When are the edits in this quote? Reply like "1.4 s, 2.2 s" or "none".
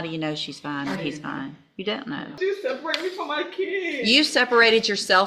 2.4 s